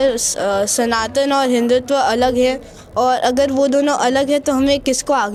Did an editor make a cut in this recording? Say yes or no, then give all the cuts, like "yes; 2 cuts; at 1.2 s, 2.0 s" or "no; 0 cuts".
no; 0 cuts